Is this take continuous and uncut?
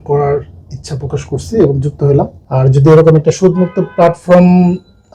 no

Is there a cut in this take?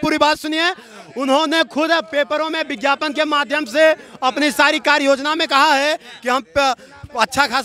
no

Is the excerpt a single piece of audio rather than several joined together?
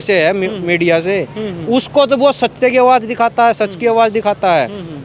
yes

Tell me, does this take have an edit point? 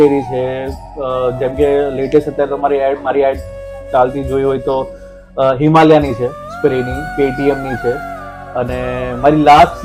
no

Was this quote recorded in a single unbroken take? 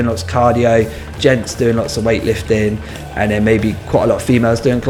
yes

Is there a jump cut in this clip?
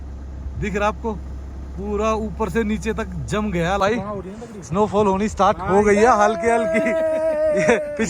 yes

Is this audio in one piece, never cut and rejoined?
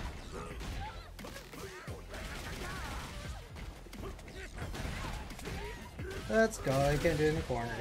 yes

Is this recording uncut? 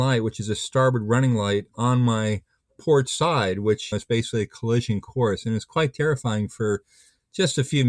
no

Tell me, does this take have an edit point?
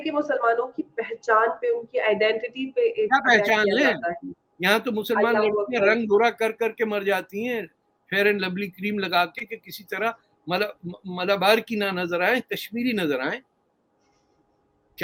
no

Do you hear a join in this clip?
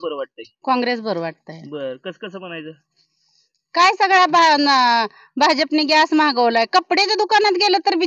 no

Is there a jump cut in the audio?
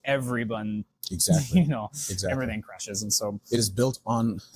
no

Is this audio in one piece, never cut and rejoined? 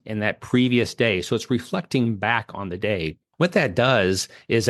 yes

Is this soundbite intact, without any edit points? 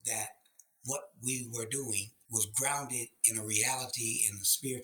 no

